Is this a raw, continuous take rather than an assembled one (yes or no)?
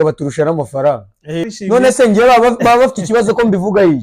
no